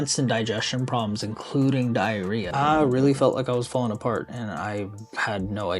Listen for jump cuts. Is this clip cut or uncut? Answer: cut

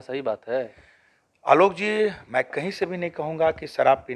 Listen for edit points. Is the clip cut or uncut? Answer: uncut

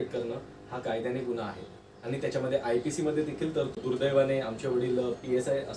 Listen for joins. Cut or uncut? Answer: cut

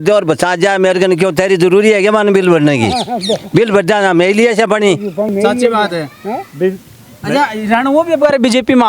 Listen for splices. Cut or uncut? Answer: uncut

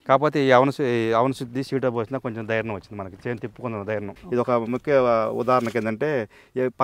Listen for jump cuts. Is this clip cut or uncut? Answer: cut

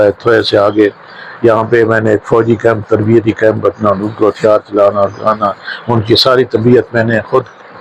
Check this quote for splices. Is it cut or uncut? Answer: uncut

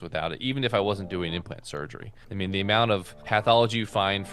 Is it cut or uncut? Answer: uncut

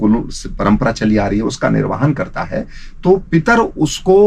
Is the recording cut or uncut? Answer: uncut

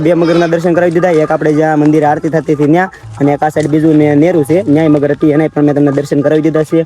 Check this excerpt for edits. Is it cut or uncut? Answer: uncut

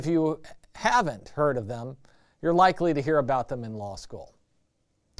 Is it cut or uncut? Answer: cut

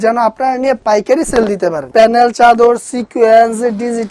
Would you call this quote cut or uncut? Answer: cut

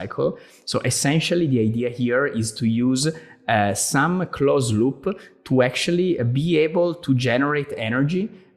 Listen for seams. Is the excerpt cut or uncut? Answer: uncut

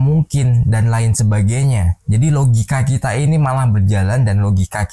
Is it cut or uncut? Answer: uncut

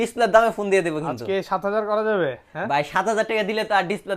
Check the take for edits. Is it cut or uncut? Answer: uncut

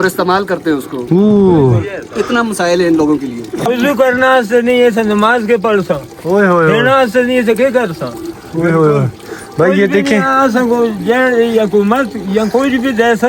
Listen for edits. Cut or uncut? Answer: uncut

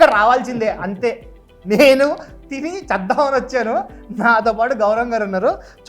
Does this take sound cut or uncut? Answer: uncut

